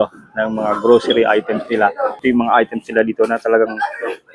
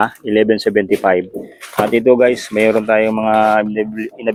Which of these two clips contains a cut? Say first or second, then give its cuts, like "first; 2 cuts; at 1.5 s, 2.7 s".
first; 1 cut; at 2.2 s